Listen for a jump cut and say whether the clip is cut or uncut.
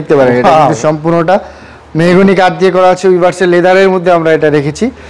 uncut